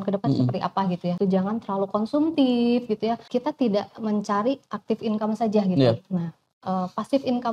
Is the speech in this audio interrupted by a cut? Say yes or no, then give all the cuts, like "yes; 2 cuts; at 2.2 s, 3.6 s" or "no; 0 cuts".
yes; 2 cuts; at 1.2 s, 3.2 s